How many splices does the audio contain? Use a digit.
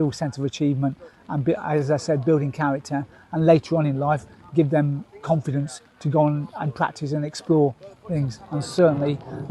0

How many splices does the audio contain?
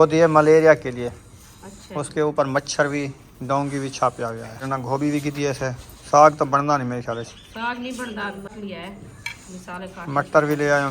2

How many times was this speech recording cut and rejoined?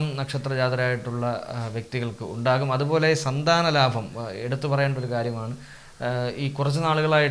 0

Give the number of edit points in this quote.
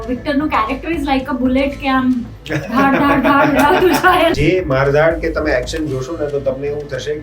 1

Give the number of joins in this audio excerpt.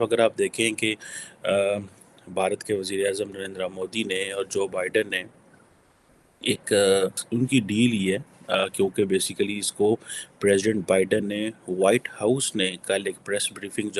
1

